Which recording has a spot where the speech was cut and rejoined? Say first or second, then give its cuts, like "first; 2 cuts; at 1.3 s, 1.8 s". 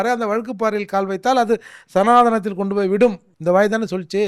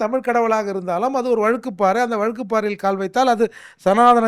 first; 1 cut; at 3.3 s